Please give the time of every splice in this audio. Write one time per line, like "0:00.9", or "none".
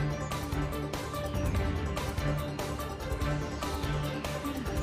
none